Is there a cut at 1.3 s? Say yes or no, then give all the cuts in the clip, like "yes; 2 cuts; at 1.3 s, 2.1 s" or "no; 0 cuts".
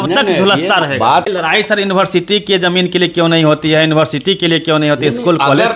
yes; 1 cut; at 1.3 s